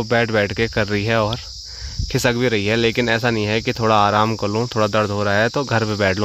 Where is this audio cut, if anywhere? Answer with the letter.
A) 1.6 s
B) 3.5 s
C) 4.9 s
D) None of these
D